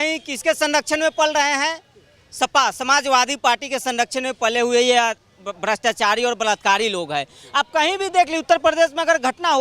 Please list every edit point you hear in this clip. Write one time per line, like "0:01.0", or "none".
none